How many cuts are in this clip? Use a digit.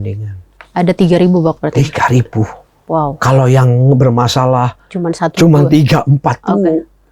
0